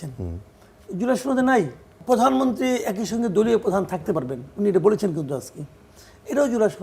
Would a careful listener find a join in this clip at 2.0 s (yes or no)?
yes